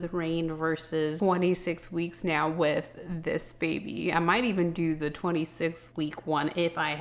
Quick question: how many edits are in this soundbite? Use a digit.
1